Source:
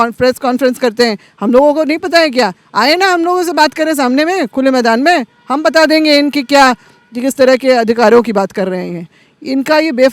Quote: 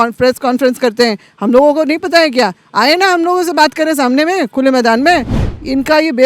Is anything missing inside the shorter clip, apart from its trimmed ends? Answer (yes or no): yes